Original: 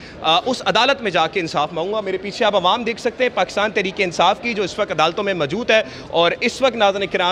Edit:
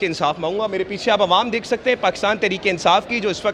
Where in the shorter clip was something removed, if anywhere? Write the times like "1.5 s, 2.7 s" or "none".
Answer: none

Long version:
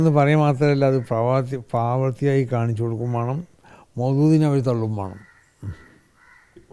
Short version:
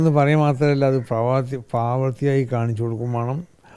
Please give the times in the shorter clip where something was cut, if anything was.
none

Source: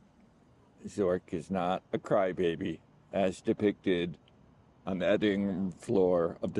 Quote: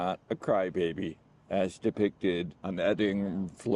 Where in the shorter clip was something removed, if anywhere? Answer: 2.6 s

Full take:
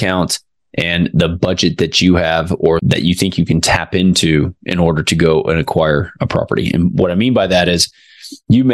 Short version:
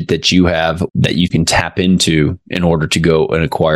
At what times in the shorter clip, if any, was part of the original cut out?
0.9 s

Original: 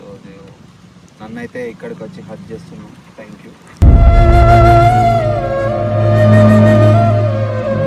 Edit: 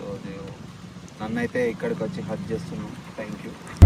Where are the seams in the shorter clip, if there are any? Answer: none

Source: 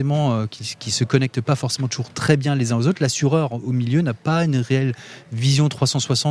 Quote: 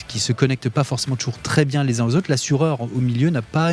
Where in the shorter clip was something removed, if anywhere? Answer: none

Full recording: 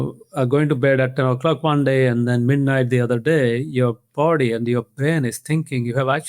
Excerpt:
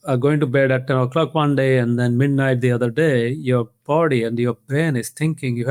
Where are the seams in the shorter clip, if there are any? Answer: none

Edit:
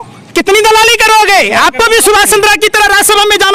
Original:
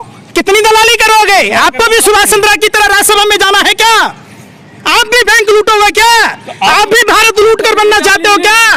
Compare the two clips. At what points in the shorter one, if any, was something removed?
none

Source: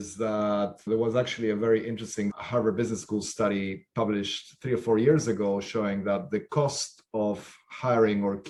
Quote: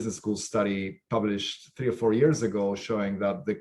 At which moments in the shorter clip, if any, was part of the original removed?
none

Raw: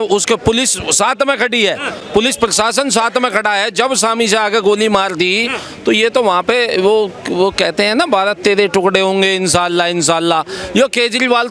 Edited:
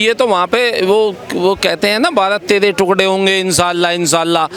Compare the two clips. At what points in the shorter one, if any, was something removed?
none

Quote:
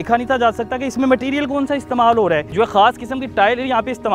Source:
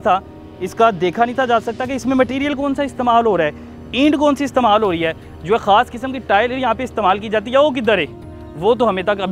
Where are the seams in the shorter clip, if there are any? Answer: 2.5 s

